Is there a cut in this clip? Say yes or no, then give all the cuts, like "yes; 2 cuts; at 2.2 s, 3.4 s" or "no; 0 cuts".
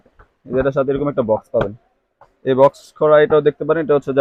no; 0 cuts